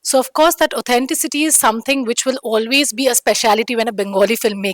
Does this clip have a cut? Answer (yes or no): no